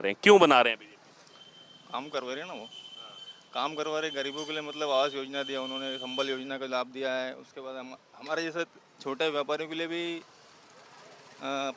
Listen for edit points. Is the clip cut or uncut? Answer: uncut